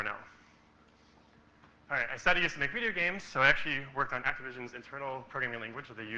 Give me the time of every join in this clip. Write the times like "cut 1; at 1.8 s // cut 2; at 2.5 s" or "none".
cut 1; at 1.6 s